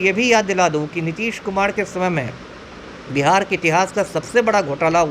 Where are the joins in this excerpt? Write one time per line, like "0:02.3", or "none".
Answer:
none